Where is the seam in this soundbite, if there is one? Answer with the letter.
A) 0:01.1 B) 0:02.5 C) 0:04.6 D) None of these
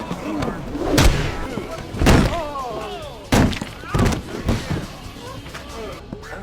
A